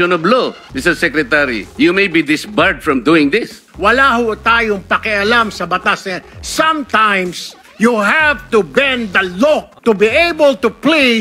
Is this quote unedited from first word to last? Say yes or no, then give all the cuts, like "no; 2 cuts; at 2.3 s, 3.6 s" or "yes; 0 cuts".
no; 2 cuts; at 3.7 s, 9.7 s